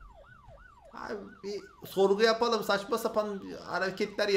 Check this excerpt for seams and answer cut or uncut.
uncut